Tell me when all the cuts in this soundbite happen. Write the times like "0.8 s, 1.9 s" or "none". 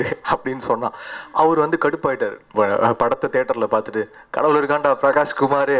2.5 s

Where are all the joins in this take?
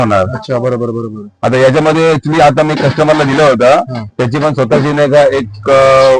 none

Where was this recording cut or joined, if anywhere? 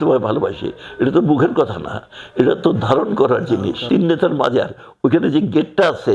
3.8 s

